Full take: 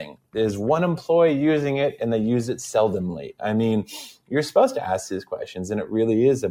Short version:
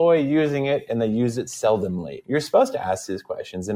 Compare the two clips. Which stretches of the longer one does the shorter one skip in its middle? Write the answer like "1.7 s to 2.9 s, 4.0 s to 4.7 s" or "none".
3.2 s to 4.1 s